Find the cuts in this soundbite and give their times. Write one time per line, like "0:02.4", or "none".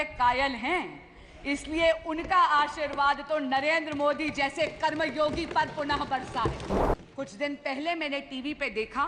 0:06.8